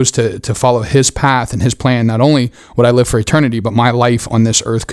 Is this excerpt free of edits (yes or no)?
yes